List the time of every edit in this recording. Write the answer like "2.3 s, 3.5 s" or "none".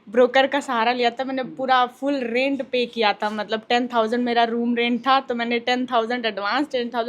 none